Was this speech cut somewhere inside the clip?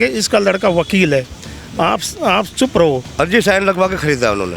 yes; 1 cut; at 3.1 s

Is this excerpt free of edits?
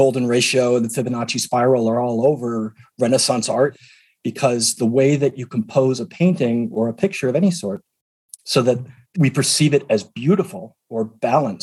no; 2 cuts; at 3.8 s, 9.0 s

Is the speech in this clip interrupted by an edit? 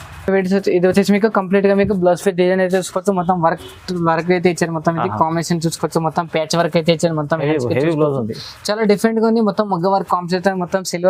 no; 0 cuts

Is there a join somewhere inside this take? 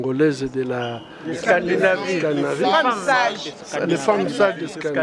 no; 0 cuts

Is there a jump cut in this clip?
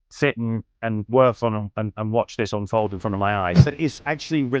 yes; 1 cut; at 3.6 s

